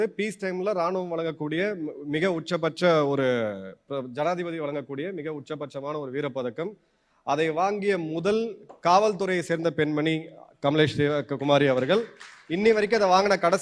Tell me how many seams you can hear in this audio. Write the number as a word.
zero